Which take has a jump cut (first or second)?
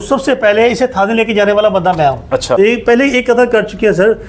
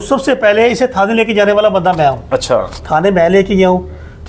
first